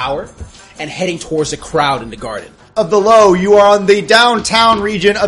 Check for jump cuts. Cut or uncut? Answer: cut